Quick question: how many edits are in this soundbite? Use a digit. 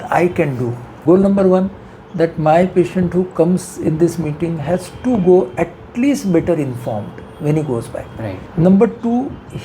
2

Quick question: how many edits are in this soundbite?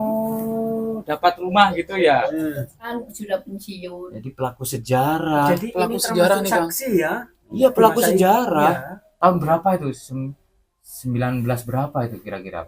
1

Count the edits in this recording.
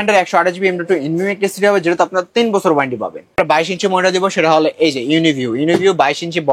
1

